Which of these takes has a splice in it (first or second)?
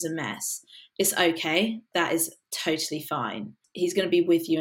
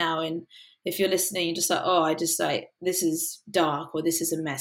first